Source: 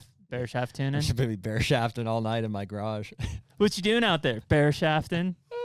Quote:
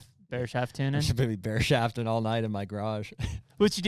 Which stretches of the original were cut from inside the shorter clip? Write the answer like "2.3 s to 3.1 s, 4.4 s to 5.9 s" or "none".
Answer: none